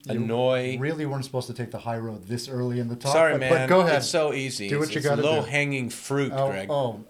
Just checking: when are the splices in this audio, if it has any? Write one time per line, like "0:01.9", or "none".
none